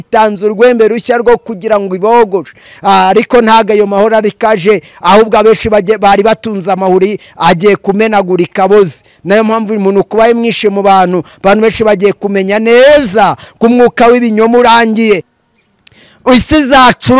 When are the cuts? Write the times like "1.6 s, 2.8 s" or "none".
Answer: 2.7 s, 15.3 s